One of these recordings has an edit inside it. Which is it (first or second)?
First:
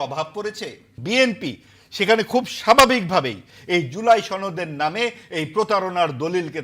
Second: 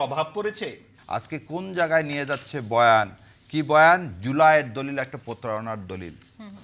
first